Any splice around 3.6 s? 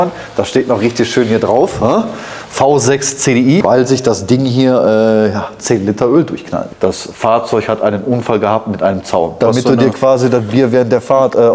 yes; 3 cuts; at 3.6 s, 6.6 s, 9.4 s

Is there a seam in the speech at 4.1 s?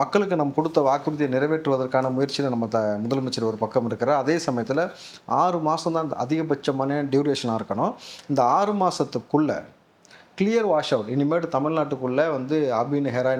no; 0 cuts

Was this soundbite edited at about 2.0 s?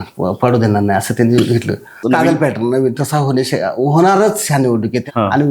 yes; 1 cut; at 2.0 s

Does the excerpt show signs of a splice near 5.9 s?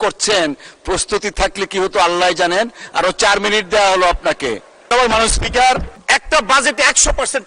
yes; 1 cut; at 5.9 s

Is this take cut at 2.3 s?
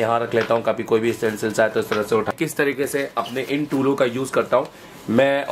yes; 1 cut; at 2.3 s

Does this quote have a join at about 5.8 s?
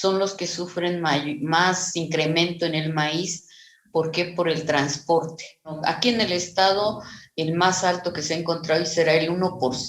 yes; 1 cut; at 5.8 s

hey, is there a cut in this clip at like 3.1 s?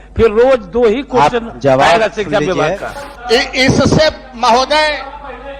yes; 1 cut; at 3.1 s

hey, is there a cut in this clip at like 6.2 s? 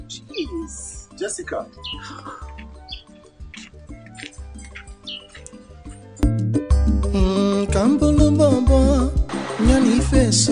yes; 1 cut; at 6.2 s

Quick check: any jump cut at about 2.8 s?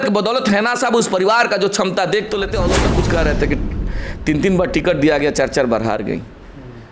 yes; 1 cut; at 2.8 s

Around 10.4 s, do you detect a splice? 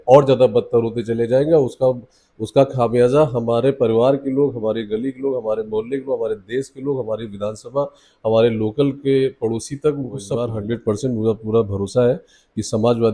yes; 1 cut; at 10.4 s

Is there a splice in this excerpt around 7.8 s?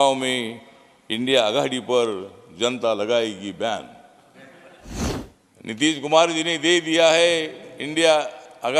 no; 1 cut; at 4.9 s

